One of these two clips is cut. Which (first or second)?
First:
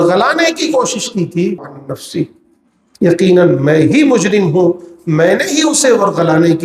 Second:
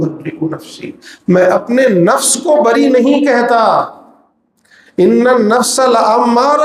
first